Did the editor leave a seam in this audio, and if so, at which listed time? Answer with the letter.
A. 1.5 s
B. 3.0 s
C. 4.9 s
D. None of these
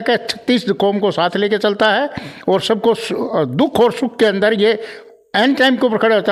D